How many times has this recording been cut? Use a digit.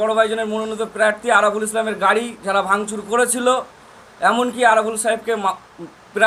0